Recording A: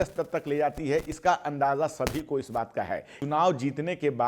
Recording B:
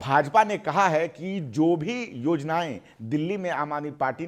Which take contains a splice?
A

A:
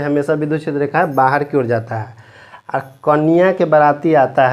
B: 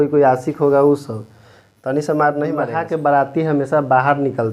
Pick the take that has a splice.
B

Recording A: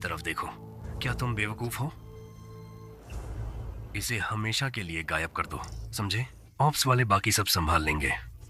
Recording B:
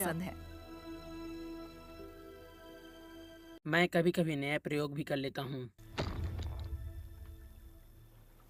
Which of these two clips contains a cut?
A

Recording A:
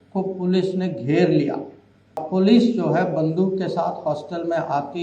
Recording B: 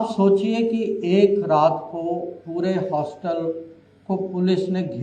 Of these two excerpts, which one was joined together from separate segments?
A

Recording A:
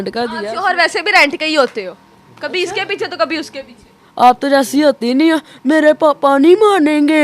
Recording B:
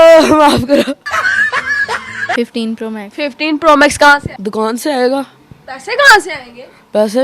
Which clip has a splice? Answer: B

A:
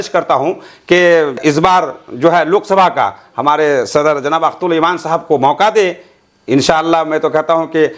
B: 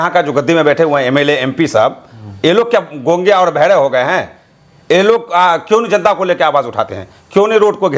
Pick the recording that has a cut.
A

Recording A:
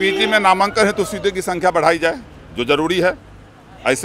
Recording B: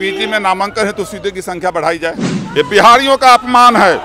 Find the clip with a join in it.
B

